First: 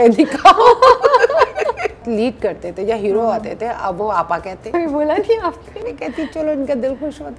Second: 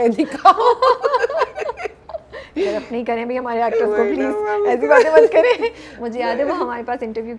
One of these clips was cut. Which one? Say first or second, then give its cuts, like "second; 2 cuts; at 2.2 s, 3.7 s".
first; 3 cuts; at 2.0 s, 4.6 s, 5.7 s